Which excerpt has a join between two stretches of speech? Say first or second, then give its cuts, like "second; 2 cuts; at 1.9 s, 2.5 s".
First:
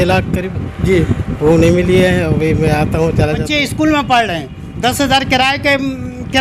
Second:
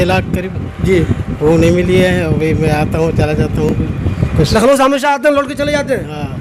first; 1 cut; at 3.5 s